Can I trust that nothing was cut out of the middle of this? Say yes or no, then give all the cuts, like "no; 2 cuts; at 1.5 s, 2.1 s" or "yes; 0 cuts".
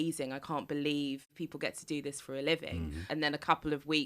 no; 2 cuts; at 1.3 s, 3.1 s